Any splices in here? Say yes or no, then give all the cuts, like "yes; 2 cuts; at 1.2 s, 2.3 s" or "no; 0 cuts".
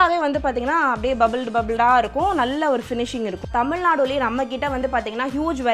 yes; 1 cut; at 3.5 s